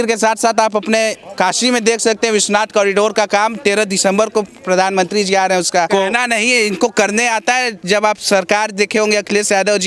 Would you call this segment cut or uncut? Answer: cut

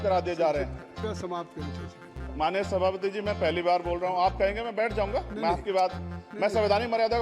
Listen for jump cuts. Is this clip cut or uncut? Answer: cut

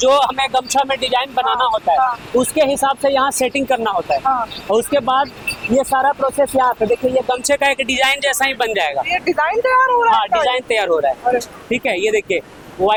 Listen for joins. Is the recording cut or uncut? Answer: uncut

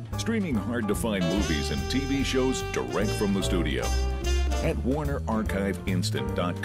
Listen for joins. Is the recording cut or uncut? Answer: uncut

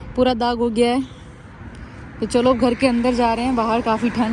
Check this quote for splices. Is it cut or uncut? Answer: uncut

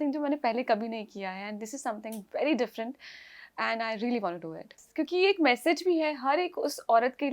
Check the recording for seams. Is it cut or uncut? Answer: uncut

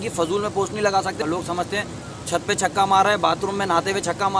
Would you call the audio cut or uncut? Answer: cut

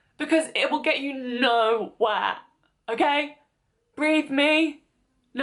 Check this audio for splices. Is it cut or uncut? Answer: uncut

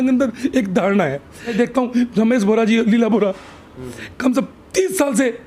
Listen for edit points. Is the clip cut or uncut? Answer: cut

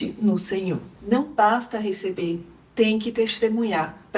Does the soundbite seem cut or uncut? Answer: cut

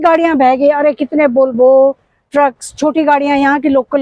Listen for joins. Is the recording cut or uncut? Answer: uncut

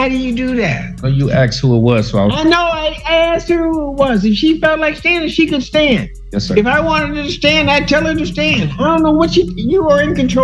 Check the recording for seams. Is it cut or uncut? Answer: uncut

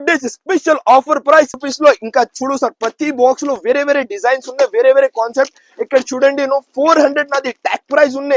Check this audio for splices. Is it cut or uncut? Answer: cut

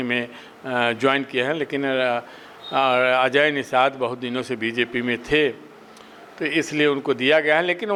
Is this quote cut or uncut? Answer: uncut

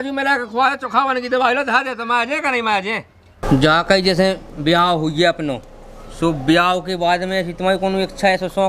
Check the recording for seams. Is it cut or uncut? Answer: cut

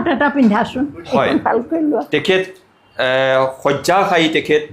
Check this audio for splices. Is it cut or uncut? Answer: uncut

